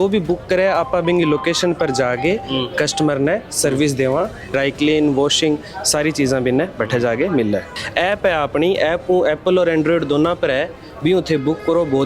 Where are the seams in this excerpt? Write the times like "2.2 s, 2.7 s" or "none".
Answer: 4.5 s, 7.8 s

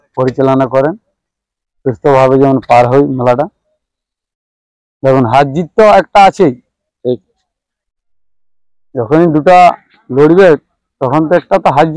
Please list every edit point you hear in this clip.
none

